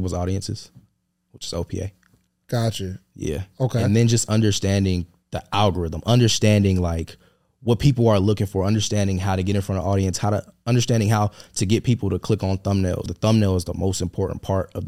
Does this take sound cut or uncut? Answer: cut